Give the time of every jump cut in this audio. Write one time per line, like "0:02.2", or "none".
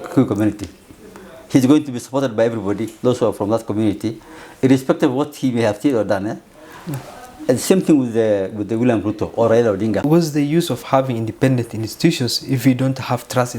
0:10.1